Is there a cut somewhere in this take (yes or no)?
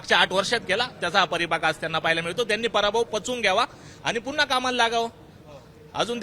no